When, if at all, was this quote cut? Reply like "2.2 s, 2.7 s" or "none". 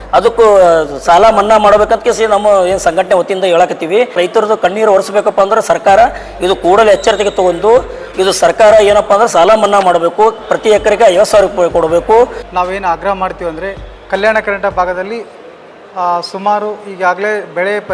4.2 s, 12.4 s

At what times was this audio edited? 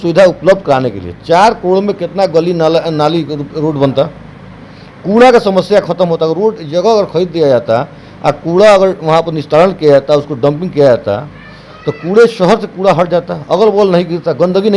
none

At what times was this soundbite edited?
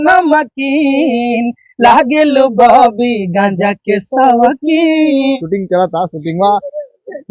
5.4 s

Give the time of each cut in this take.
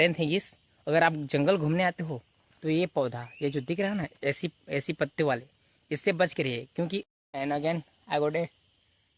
7.2 s

